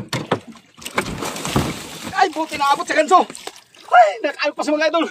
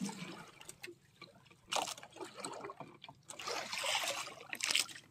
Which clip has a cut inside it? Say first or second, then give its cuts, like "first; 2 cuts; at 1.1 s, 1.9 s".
second; 1 cut; at 3.4 s